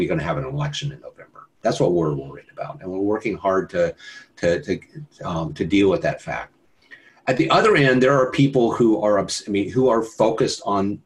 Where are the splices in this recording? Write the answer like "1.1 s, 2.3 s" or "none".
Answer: none